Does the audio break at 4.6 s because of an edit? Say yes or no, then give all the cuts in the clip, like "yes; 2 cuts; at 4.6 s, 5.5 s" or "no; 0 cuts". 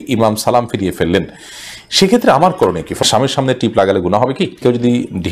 yes; 2 cuts; at 3.0 s, 4.6 s